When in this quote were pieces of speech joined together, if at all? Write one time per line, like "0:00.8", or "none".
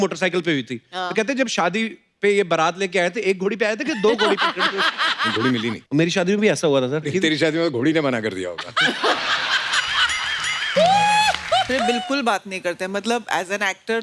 0:05.5
0:07.1
0:11.7